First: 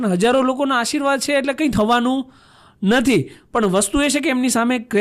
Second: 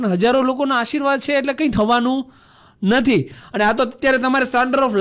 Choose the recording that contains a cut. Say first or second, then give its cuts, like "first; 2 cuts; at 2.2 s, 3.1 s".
second; 1 cut; at 3.4 s